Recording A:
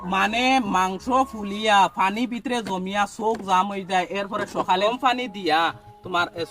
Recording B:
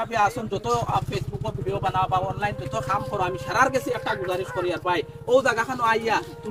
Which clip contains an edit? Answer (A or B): A